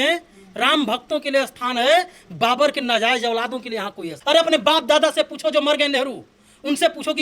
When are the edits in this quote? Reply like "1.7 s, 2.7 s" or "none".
4.1 s